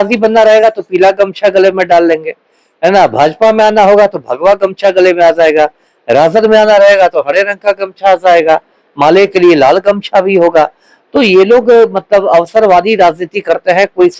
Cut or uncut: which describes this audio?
uncut